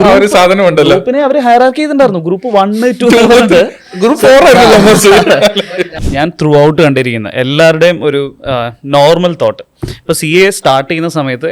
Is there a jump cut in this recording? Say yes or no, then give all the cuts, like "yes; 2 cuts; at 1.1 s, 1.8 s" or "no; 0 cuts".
yes; 1 cut; at 5.6 s